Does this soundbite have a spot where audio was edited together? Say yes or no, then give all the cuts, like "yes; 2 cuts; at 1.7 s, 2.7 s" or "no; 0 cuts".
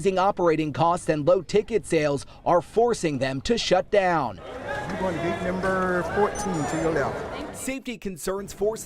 yes; 1 cut; at 7.4 s